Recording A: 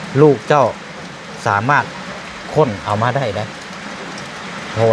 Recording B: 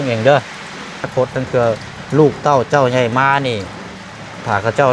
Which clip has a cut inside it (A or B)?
B